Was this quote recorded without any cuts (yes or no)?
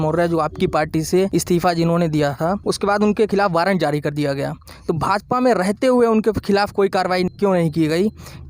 no